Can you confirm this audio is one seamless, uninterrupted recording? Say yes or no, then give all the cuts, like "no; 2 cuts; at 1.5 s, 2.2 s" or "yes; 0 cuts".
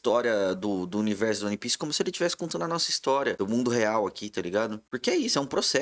no; 2 cuts; at 3.4 s, 4.9 s